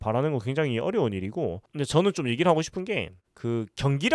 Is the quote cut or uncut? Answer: cut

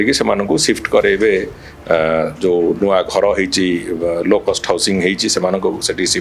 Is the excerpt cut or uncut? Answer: uncut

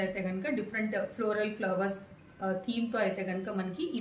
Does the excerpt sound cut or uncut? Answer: uncut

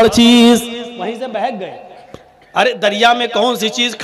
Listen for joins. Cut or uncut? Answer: uncut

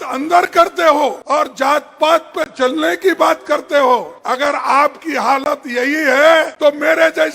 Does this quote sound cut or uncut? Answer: cut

